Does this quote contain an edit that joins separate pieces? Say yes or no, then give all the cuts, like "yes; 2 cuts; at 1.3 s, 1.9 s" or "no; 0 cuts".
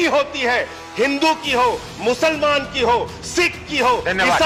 no; 0 cuts